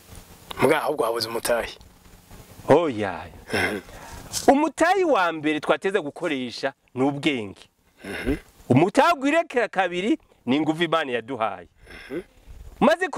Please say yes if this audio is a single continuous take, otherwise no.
yes